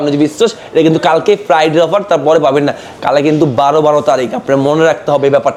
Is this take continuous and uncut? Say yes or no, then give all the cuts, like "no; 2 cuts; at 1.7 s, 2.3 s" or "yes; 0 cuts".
yes; 0 cuts